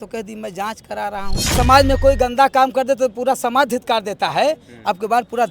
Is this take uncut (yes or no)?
no